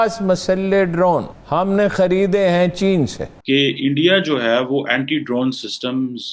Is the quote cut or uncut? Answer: cut